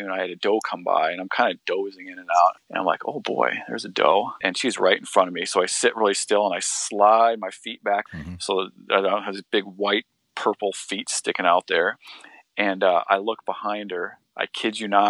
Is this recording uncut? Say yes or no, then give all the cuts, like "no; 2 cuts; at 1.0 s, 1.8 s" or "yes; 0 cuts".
no; 3 cuts; at 2.6 s, 4.4 s, 8.1 s